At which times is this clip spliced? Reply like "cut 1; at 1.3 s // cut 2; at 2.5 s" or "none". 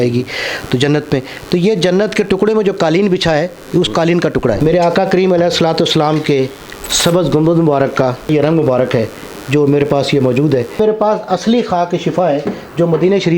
cut 1; at 4.6 s // cut 2; at 8.3 s // cut 3; at 10.8 s